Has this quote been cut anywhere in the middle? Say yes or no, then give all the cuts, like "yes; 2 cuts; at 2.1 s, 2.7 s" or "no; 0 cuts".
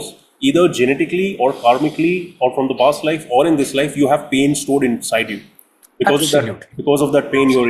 no; 0 cuts